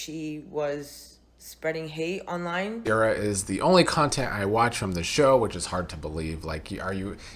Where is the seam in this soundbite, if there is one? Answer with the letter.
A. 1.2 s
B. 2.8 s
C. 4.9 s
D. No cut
B